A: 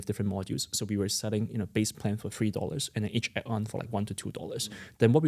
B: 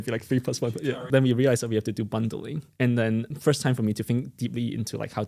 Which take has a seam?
B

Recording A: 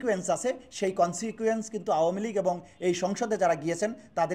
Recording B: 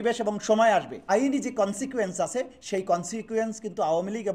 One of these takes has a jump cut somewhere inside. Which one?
B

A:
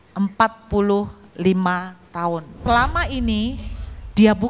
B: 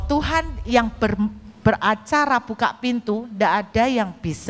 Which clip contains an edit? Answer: A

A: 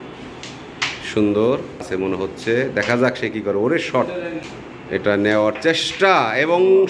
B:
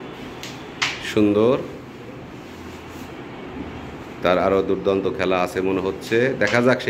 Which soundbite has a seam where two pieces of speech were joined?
A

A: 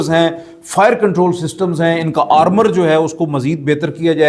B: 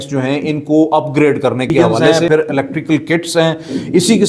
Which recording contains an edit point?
B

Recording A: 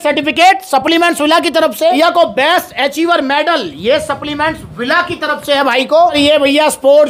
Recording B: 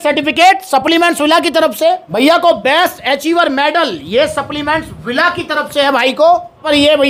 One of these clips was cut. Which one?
A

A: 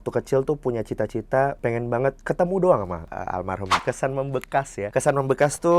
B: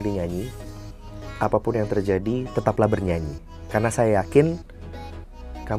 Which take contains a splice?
A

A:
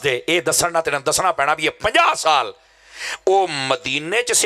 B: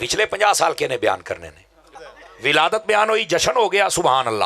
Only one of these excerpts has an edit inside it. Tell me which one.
B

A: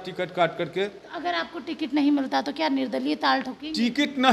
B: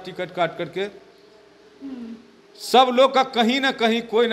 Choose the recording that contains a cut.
A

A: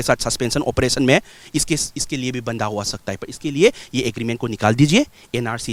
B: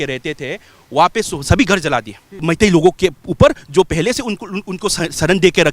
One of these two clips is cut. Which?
B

